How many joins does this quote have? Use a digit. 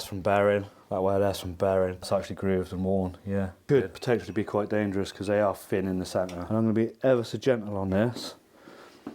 3